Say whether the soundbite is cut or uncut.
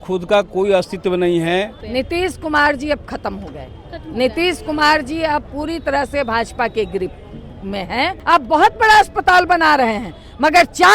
cut